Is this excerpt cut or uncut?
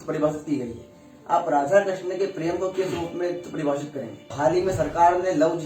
cut